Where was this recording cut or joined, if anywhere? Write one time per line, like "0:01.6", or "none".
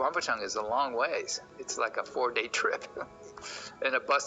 none